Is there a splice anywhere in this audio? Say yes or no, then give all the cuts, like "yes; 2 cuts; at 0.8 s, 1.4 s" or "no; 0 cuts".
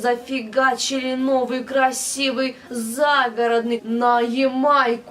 yes; 1 cut; at 3.8 s